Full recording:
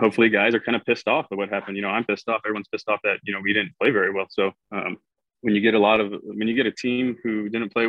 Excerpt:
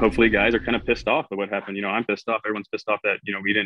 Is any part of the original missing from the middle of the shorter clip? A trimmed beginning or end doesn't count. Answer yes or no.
no